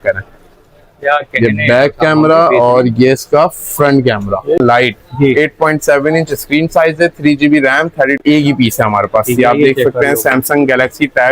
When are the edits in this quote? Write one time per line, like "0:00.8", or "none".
0:04.6
0:08.2

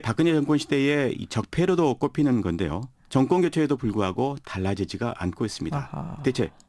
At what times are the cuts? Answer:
0:05.0

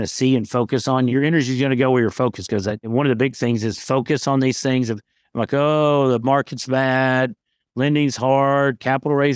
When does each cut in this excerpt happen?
0:01.1
0:02.9

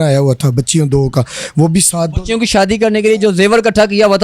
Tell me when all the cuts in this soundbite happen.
none

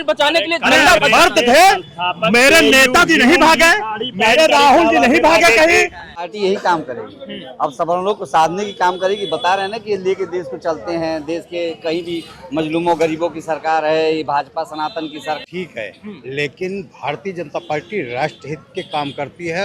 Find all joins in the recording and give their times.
0:06.3
0:15.4

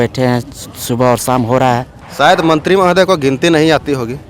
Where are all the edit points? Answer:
0:02.0

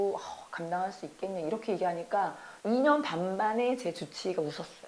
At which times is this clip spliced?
0:02.5

